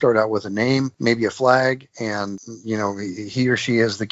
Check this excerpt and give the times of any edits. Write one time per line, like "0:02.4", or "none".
0:00.9
0:02.2